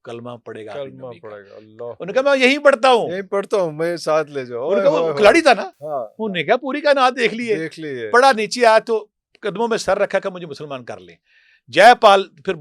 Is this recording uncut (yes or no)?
yes